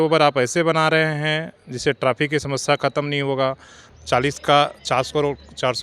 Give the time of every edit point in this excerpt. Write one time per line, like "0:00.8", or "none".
0:03.9